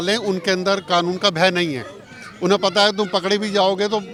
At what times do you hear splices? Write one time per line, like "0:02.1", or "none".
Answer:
none